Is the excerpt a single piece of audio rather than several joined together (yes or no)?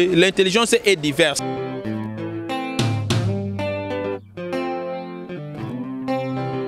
no